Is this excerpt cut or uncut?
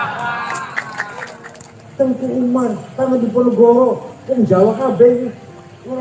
cut